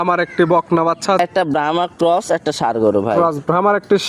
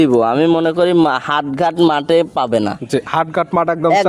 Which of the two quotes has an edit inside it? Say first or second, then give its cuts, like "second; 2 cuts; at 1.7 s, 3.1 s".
first; 1 cut; at 1.2 s